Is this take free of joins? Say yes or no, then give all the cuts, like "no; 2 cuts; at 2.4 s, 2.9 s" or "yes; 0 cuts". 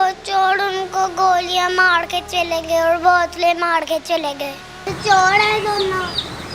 no; 1 cut; at 4.7 s